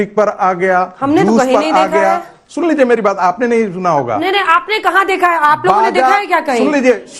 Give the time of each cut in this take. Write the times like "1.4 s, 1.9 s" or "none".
none